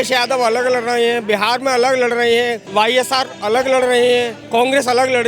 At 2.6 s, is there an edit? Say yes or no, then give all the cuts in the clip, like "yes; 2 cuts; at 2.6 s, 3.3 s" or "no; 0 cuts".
yes; 2 cuts; at 2.6 s, 4.4 s